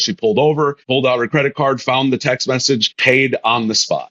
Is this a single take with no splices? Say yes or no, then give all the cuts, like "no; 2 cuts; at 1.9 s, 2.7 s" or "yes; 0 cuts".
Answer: no; 2 cuts; at 0.8 s, 2.9 s